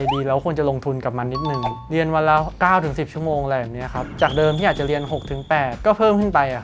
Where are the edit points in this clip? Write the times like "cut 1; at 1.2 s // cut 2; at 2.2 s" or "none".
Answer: none